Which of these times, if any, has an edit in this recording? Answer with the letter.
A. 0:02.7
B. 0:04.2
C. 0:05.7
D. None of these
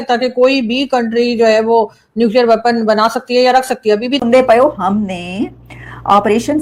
B